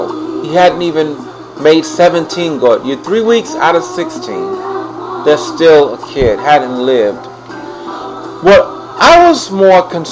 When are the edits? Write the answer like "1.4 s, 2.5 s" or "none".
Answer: none